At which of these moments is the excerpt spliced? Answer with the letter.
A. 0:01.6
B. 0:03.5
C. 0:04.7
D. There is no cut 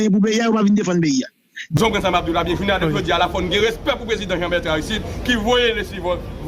A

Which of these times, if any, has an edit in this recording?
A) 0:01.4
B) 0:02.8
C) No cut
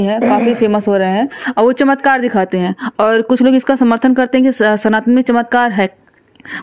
C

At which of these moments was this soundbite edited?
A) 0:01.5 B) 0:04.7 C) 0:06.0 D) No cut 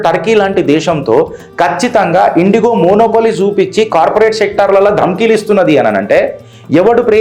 D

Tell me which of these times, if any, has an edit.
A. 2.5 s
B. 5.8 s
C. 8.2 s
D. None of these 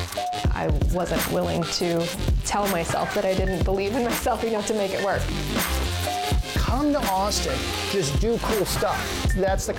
D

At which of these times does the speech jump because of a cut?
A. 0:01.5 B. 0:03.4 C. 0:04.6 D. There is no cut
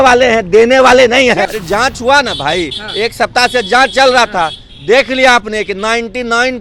A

